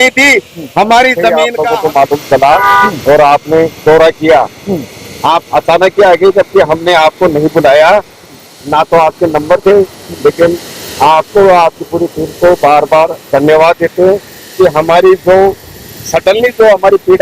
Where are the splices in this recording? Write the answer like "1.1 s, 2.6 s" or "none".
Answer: 1.4 s